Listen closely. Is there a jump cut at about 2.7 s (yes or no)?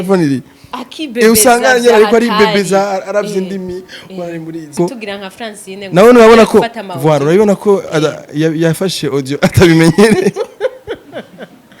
no